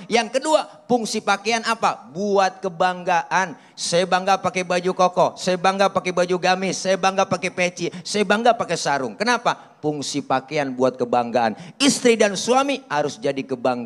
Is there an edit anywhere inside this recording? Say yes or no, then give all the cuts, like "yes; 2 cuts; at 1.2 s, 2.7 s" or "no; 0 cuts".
no; 0 cuts